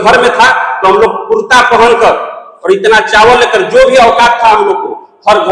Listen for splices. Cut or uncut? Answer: uncut